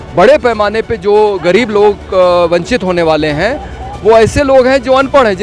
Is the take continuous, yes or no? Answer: yes